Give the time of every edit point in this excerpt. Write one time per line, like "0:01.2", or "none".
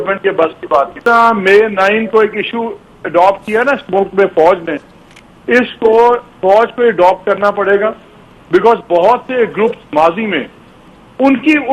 0:01.0